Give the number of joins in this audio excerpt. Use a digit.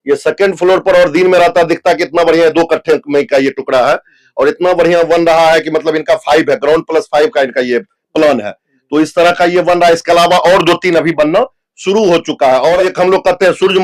1